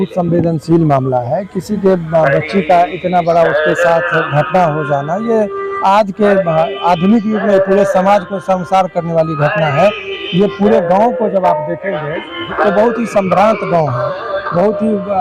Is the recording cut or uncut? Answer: uncut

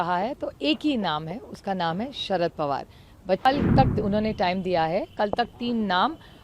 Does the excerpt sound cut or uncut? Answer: cut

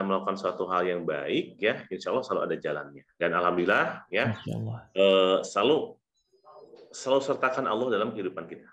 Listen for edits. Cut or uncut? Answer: uncut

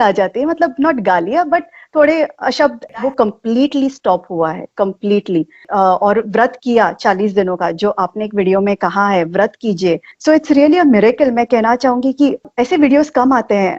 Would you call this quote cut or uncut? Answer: cut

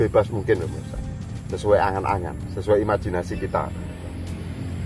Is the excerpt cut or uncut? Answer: uncut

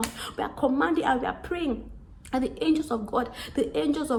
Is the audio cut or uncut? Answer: uncut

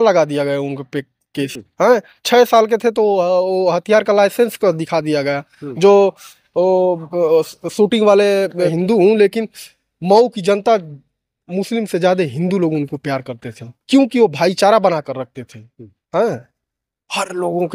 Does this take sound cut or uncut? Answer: cut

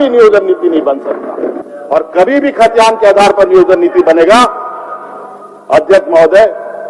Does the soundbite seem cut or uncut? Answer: cut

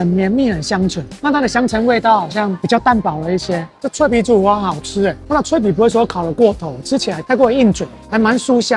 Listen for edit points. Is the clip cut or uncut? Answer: cut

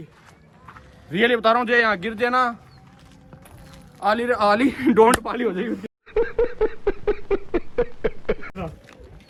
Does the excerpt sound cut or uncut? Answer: uncut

